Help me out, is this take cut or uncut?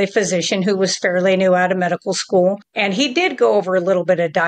cut